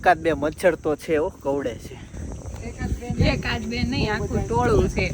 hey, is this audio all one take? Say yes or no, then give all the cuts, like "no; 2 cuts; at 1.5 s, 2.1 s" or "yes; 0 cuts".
yes; 0 cuts